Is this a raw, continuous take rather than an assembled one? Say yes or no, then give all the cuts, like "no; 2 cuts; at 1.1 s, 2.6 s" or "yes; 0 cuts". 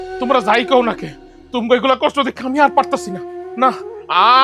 yes; 0 cuts